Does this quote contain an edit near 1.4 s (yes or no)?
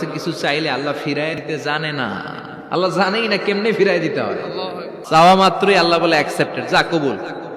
yes